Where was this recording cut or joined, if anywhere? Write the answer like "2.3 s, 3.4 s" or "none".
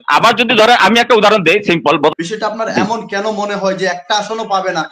2.1 s